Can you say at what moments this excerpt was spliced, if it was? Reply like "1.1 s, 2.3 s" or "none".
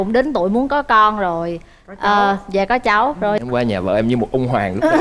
3.4 s